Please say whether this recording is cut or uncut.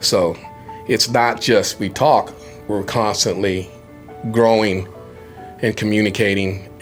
uncut